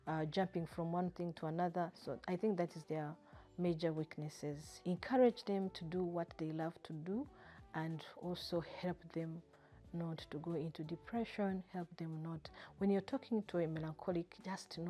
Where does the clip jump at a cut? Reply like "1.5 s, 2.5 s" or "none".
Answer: 4.7 s